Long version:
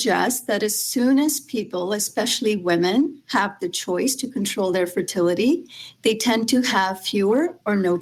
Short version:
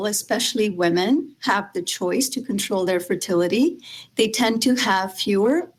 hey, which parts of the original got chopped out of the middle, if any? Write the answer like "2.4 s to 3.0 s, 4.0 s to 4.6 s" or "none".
none